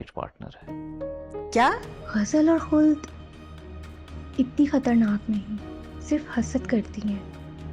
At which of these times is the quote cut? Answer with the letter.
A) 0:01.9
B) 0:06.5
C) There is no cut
A